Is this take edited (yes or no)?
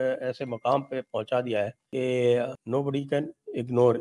yes